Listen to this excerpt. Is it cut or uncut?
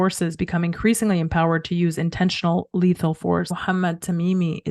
cut